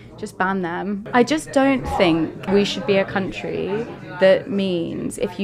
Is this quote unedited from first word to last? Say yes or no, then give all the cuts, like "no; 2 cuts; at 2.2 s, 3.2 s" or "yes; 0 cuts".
no; 2 cuts; at 1.0 s, 2.4 s